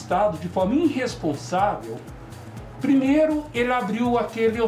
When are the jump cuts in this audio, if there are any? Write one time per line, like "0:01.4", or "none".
none